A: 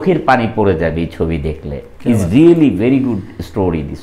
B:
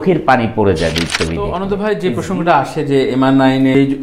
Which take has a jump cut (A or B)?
B